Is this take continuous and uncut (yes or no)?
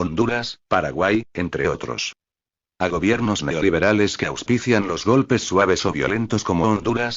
no